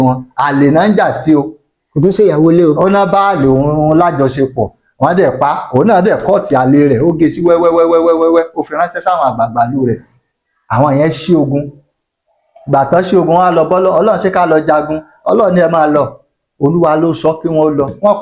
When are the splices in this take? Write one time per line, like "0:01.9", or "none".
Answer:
none